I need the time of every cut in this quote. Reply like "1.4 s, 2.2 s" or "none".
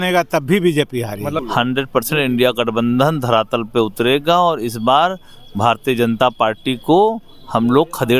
1.4 s